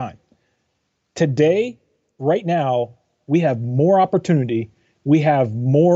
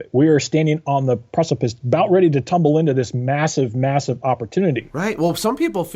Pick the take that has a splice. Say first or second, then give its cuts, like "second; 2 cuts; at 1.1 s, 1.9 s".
second; 1 cut; at 4.9 s